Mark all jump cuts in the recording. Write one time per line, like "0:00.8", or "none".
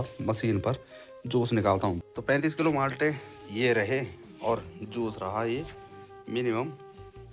0:02.1